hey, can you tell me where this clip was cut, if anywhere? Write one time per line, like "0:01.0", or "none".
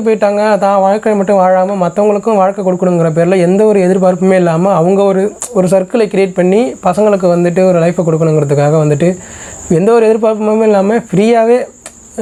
none

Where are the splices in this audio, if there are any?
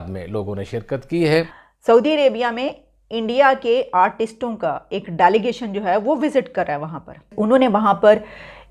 0:01.4
0:07.3

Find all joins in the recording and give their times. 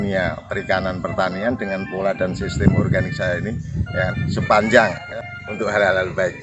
0:05.0

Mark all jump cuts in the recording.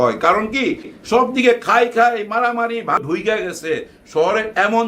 0:03.0

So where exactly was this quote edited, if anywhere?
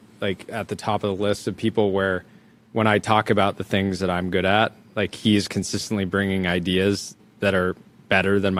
none

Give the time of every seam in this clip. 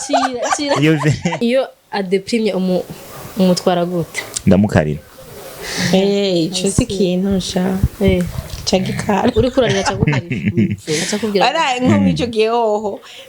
0:01.4

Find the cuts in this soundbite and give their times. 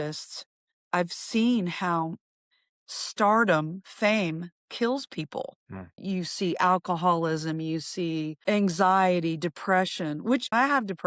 0:05.9

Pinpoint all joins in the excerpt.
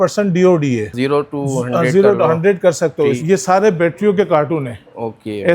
0:00.9
0:03.2

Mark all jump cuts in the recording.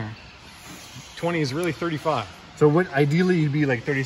none

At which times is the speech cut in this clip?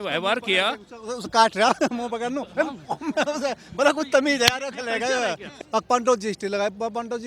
0:05.6

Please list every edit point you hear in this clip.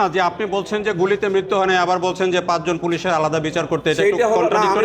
none

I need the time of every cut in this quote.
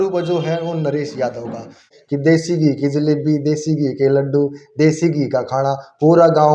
0:01.9

